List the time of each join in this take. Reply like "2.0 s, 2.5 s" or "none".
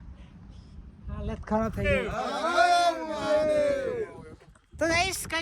2.2 s